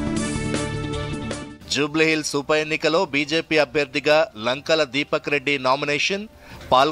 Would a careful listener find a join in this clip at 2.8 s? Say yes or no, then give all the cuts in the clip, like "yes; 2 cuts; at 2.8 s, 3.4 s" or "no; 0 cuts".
no; 1 cut; at 1.2 s